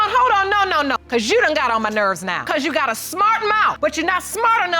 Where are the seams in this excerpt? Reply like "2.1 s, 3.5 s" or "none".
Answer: 0.9 s, 2.3 s, 3.8 s